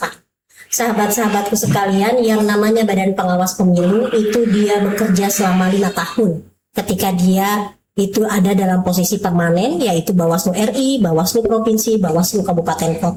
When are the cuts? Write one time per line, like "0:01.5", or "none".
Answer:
none

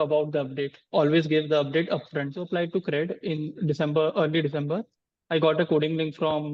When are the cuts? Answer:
0:02.4

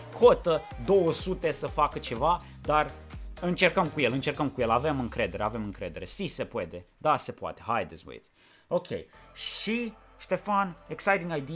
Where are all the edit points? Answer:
none

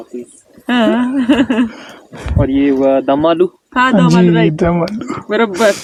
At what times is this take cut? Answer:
none

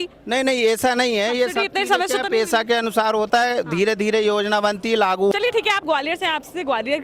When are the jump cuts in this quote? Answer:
0:05.3

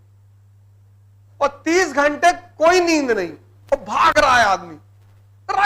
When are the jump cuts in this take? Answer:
0:01.2

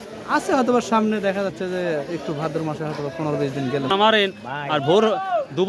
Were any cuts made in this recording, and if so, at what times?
0:03.9

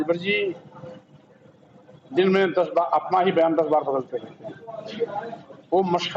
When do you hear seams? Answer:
0:04.8

